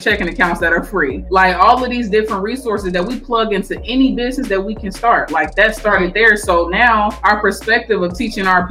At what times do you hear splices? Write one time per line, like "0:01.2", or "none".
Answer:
0:01.2
0:07.2